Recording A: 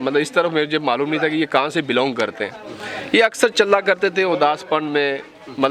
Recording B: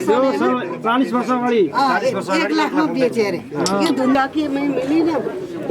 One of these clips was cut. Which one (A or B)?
B